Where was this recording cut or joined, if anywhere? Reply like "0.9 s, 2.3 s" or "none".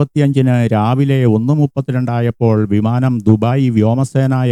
none